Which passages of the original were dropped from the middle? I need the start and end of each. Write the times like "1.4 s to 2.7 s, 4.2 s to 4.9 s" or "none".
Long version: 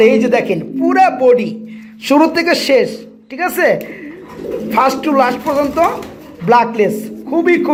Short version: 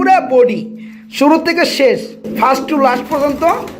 3.1 s to 4.5 s